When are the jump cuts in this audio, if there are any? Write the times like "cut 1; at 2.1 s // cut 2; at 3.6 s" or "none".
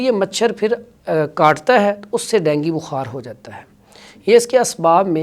none

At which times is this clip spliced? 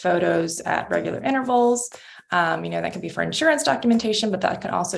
none

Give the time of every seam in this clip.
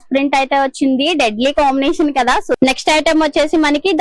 cut 1; at 2.6 s

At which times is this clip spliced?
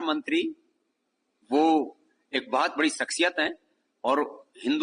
none

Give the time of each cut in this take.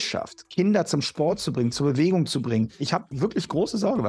cut 1; at 2.8 s

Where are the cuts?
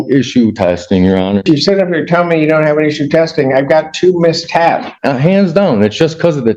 cut 1; at 1.4 s // cut 2; at 4.9 s

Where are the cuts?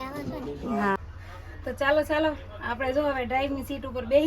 cut 1; at 1.0 s

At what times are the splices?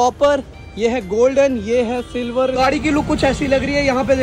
cut 1; at 2.6 s

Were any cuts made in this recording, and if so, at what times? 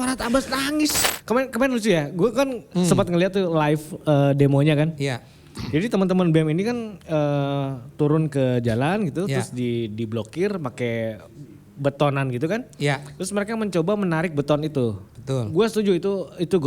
cut 1; at 1.0 s

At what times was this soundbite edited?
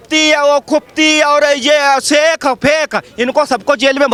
none

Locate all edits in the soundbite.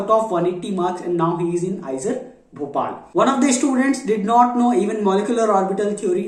none

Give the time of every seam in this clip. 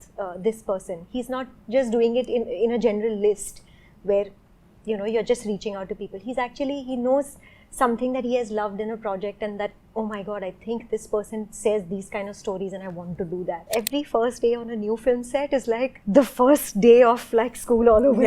cut 1; at 13.6 s

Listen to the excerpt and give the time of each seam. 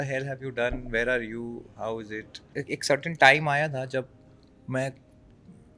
cut 1; at 2.5 s

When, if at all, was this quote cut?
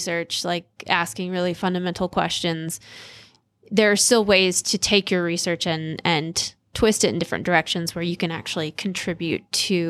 none

